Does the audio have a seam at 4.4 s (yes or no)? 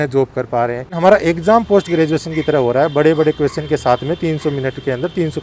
no